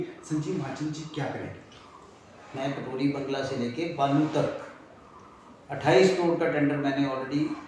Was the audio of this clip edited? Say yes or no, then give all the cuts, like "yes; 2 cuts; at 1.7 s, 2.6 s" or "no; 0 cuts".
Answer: no; 0 cuts